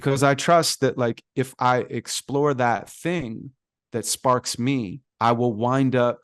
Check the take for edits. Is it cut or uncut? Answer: cut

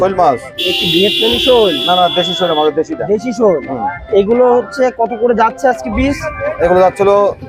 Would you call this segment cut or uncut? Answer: uncut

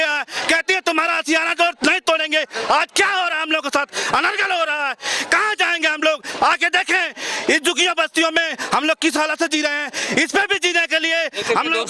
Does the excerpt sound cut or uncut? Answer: uncut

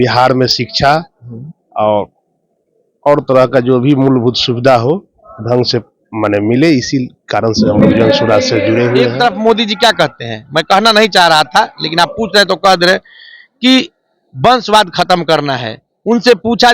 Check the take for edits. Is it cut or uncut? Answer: cut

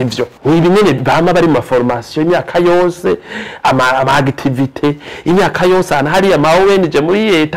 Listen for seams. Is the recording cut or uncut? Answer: uncut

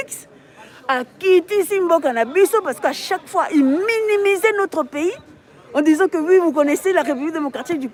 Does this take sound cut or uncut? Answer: uncut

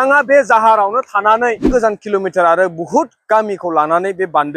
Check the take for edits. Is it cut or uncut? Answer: cut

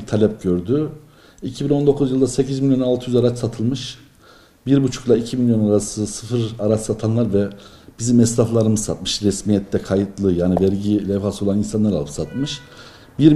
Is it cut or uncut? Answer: uncut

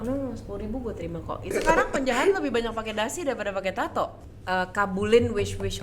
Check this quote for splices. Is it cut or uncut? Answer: cut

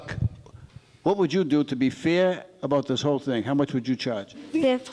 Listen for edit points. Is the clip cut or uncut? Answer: uncut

